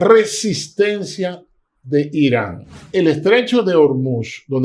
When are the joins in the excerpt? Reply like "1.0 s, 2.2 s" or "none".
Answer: 2.8 s